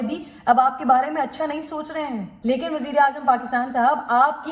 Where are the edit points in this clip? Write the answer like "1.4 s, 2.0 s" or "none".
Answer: 2.3 s